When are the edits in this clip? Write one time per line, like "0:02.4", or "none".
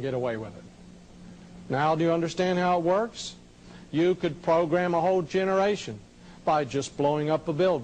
0:04.7

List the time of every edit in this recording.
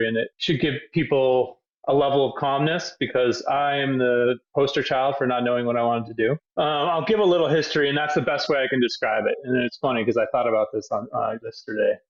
none

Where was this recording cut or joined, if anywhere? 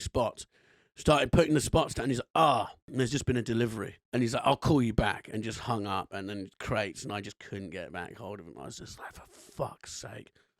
0:03.9

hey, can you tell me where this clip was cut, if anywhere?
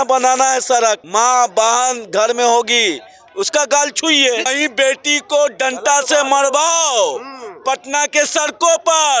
0:01.0
0:04.5

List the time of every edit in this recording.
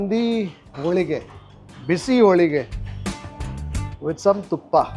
none

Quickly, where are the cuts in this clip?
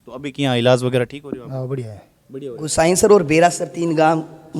0:02.7

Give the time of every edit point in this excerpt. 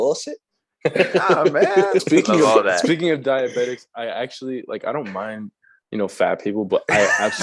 0:02.0

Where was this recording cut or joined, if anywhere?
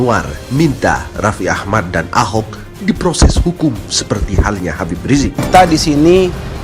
0:05.4

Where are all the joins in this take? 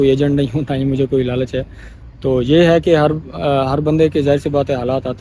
none

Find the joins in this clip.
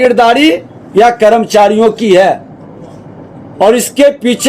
none

